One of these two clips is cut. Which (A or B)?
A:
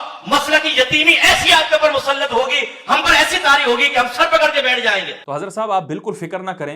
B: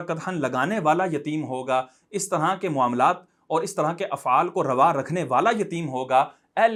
A